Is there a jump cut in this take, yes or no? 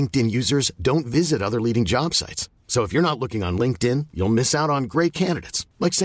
no